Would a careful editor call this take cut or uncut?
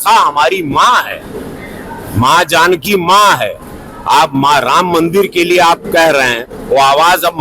uncut